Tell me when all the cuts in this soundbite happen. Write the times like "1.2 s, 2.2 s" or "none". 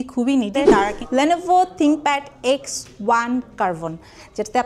1.0 s